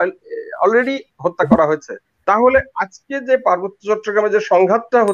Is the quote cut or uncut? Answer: cut